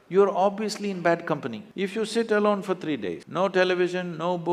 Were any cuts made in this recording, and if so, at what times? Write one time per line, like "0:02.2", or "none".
0:01.7